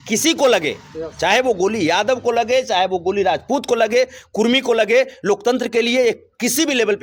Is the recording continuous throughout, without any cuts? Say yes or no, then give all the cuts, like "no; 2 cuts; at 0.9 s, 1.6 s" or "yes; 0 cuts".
yes; 0 cuts